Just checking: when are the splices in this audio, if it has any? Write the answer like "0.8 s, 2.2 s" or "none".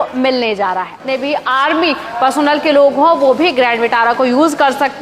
1.0 s